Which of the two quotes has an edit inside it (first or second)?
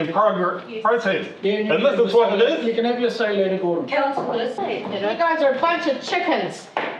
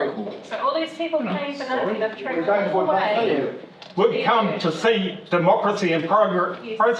first